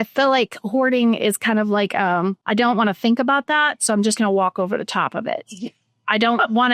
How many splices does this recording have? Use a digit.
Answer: 1